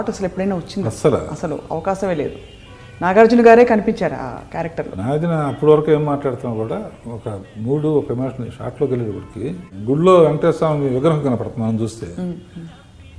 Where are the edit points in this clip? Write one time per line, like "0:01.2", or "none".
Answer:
0:04.9
0:09.6